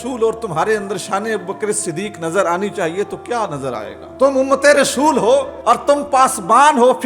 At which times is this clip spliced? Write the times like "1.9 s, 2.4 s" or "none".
4.0 s, 5.5 s